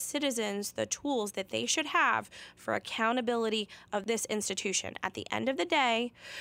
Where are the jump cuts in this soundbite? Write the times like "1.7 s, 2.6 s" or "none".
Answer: 4.0 s